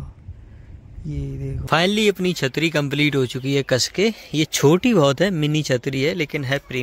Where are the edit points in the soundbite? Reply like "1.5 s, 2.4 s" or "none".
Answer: 1.7 s